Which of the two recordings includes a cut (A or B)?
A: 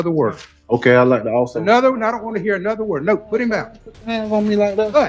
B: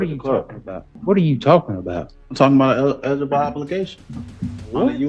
B